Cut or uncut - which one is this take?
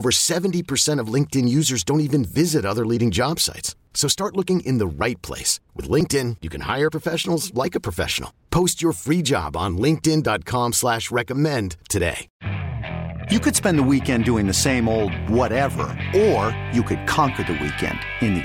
cut